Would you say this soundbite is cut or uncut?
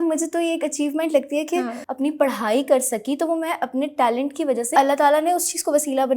cut